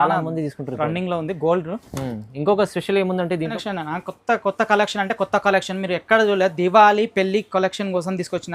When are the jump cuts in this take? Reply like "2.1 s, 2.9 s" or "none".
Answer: 3.6 s